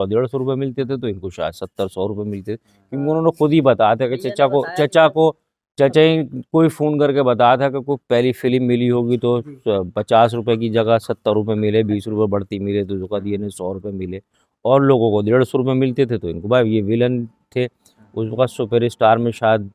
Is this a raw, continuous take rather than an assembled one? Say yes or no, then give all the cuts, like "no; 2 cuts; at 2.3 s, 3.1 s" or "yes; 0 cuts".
yes; 0 cuts